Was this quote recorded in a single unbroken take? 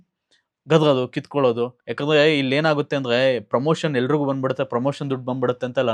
no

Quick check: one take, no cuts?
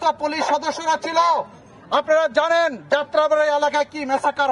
yes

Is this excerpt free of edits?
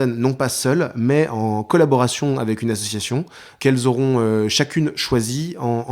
no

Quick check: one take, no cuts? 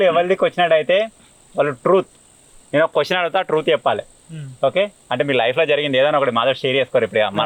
yes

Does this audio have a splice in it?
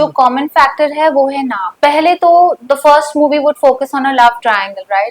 yes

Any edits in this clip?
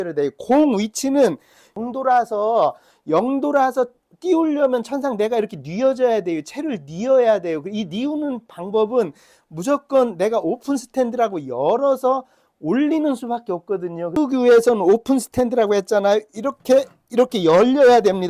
yes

